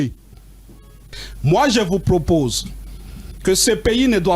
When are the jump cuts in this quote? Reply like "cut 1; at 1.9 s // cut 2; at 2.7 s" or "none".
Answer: cut 1; at 1.2 s